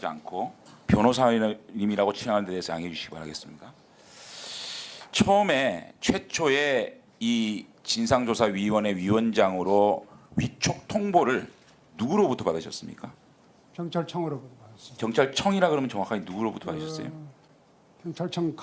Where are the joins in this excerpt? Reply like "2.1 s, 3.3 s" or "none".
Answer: none